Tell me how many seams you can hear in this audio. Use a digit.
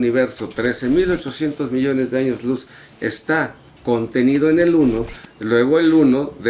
0